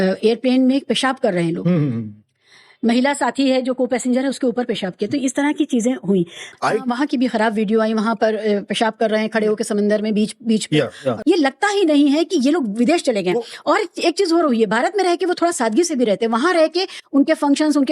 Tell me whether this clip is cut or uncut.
cut